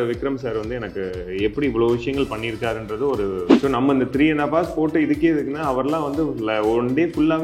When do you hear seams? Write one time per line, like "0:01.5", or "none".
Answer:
0:03.5